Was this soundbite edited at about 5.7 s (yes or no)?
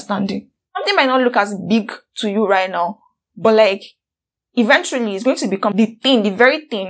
yes